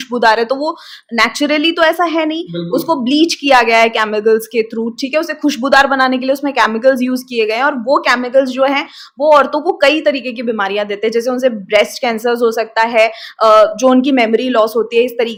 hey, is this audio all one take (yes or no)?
yes